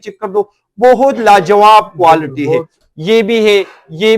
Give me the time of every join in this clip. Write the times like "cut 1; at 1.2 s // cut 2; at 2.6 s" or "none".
cut 1; at 2.8 s